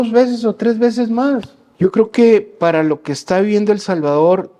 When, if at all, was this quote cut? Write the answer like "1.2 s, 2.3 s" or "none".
1.6 s